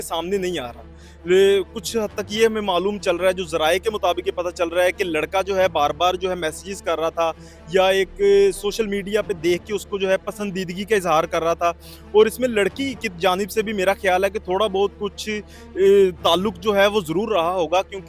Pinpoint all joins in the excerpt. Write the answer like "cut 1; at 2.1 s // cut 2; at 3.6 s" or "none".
none

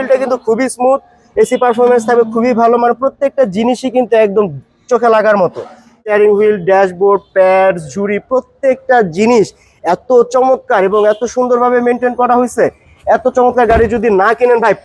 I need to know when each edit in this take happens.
cut 1; at 6.0 s

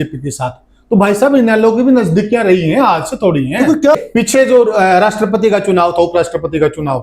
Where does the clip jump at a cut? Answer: cut 1; at 4.0 s

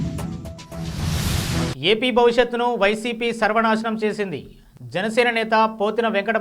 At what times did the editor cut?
cut 1; at 1.7 s

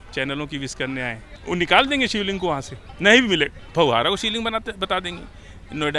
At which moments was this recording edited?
none

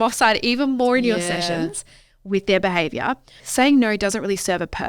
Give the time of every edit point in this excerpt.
cut 1; at 3.4 s

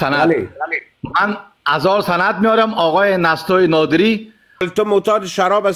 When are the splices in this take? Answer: cut 1; at 4.7 s

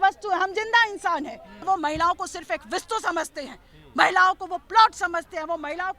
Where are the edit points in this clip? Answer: cut 1; at 1.6 s

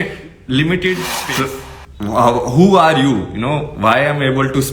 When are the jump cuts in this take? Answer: cut 1; at 1.2 s

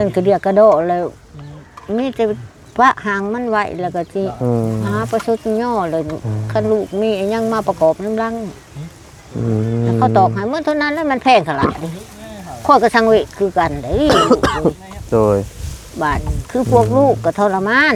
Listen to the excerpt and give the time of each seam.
none

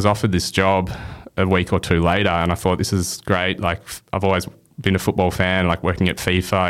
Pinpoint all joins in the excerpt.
none

